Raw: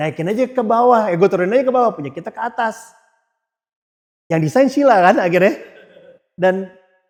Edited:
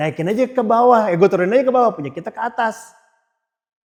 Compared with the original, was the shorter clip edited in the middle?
no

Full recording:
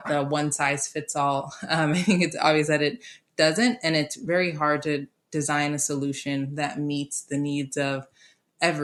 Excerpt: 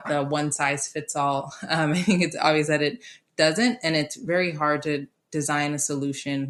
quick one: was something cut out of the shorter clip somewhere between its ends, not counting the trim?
no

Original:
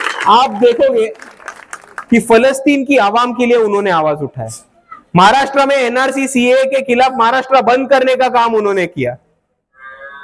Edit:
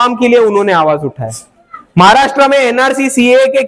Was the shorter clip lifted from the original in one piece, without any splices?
yes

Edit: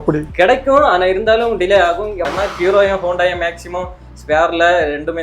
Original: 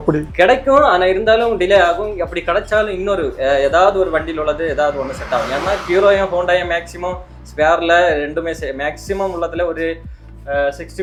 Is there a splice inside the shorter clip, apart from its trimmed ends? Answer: yes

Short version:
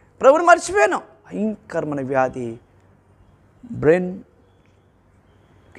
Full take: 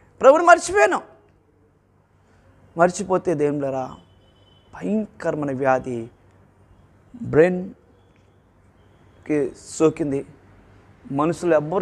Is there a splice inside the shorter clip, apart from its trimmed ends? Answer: yes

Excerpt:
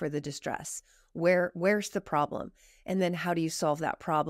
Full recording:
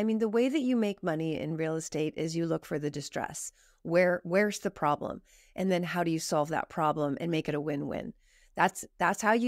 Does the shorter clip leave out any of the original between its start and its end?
no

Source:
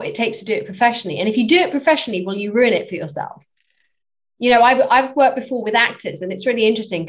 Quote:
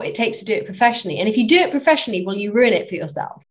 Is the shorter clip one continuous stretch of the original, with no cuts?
yes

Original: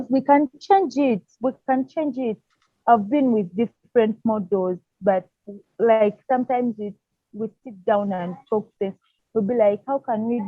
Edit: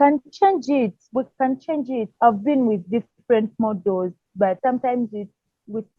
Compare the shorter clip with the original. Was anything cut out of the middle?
yes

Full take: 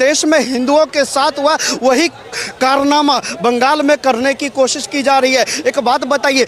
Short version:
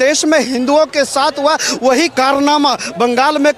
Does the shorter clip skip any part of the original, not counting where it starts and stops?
yes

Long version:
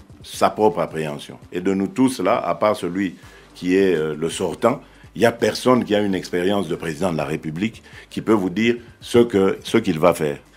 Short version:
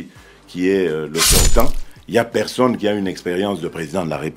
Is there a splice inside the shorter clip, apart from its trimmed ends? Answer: no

